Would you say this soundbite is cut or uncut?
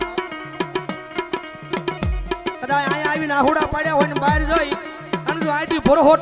uncut